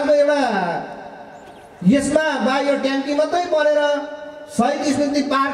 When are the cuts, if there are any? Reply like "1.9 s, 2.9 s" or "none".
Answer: none